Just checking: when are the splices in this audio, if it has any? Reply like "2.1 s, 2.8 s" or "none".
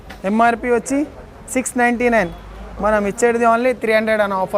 none